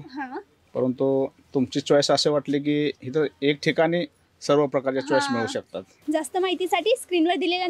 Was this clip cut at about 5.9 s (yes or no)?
yes